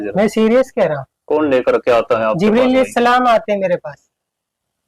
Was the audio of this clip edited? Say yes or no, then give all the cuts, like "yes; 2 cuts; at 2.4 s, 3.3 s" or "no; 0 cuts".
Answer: yes; 1 cut; at 1.1 s